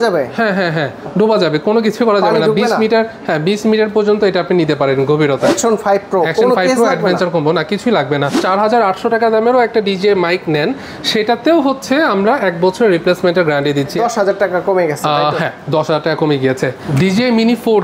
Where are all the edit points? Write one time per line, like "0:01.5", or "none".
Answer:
0:08.4
0:14.0
0:16.9